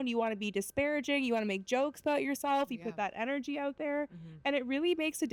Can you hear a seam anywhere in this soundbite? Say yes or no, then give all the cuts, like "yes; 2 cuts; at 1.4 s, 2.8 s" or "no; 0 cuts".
no; 0 cuts